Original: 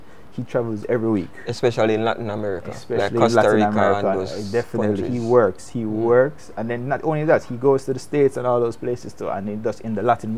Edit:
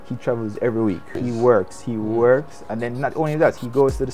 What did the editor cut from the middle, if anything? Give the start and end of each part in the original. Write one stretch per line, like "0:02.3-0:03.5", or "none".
0:01.4-0:05.0